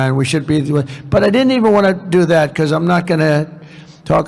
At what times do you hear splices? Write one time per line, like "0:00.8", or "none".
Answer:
none